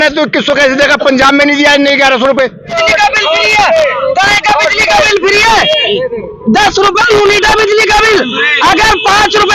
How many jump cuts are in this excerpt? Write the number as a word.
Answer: one